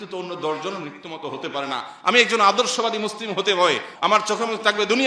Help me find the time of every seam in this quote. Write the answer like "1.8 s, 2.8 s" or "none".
3.9 s